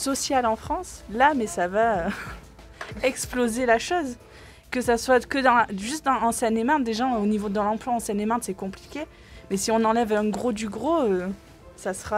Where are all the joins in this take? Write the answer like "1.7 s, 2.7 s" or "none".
none

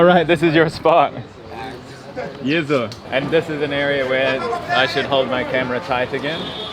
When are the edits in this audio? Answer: 3.1 s

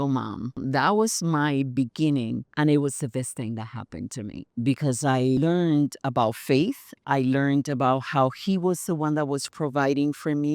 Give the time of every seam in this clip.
6.9 s

